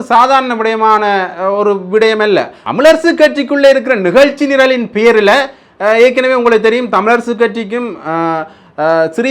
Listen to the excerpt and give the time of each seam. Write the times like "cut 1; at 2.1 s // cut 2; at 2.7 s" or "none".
cut 1; at 2.6 s